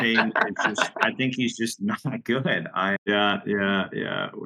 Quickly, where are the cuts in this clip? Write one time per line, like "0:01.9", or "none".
0:03.0